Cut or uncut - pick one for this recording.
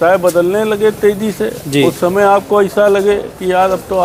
uncut